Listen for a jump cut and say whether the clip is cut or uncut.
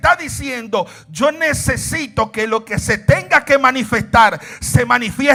uncut